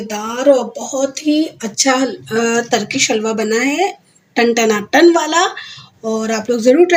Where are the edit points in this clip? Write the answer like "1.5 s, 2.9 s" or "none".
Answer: none